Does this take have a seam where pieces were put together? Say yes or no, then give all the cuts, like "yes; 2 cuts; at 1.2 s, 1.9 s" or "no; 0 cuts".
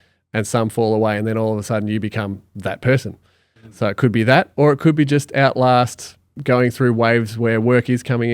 yes; 1 cut; at 6.3 s